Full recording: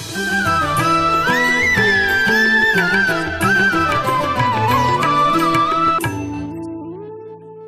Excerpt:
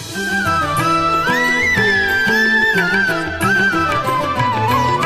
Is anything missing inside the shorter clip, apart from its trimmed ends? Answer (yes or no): no